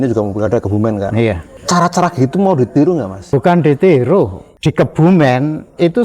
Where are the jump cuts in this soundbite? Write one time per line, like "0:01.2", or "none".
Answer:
0:01.5
0:03.3
0:04.4

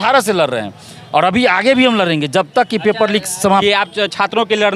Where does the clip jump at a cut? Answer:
0:03.6

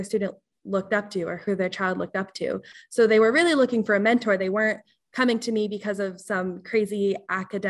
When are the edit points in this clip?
none

